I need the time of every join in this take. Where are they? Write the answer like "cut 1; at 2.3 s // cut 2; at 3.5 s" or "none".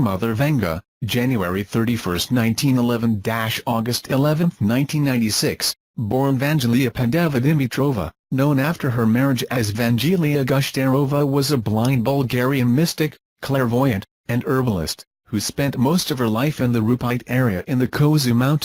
none